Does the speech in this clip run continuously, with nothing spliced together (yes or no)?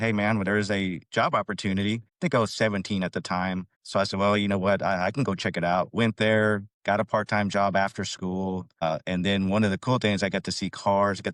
yes